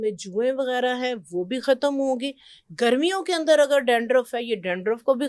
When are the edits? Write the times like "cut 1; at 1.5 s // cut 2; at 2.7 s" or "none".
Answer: none